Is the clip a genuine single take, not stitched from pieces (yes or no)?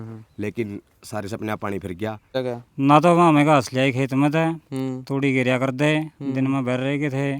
no